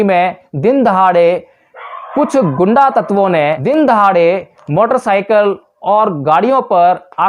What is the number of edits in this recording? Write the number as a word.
one